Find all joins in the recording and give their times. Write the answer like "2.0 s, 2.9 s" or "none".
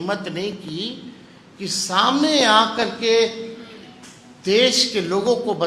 none

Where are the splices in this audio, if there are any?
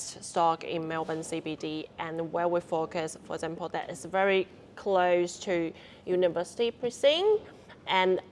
none

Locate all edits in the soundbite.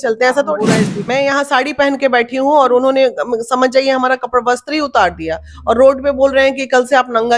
1.0 s

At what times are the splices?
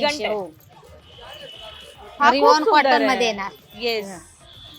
none

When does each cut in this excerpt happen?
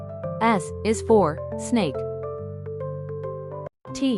none

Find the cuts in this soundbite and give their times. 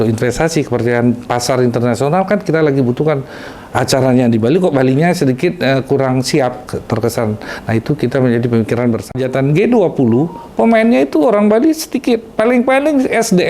9.1 s

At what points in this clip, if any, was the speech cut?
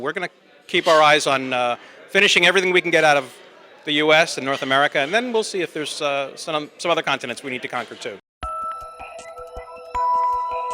8.2 s

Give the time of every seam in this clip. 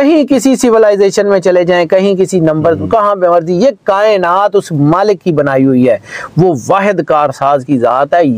none

